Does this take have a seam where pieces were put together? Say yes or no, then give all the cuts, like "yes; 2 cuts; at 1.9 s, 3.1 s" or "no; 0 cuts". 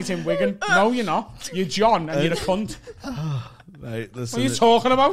no; 0 cuts